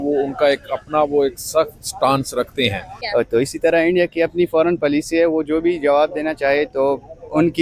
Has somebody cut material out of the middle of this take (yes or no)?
yes